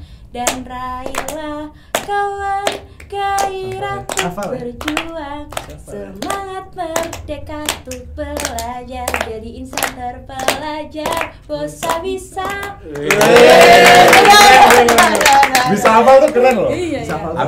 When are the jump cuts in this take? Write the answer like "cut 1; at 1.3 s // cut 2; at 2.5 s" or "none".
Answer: none